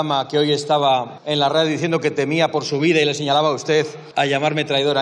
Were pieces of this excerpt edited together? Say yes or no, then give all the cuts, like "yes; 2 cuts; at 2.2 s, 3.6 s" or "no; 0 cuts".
yes; 2 cuts; at 1.2 s, 4.0 s